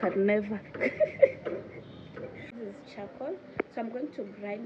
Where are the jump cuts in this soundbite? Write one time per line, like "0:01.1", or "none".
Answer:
0:02.5